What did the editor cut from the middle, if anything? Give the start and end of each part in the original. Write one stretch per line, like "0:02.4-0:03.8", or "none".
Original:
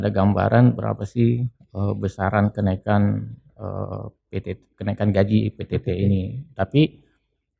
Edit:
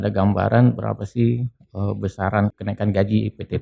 0:02.5-0:04.7